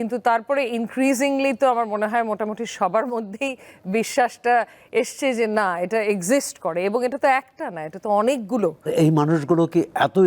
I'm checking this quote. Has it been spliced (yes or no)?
yes